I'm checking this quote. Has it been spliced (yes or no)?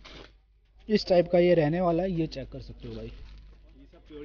no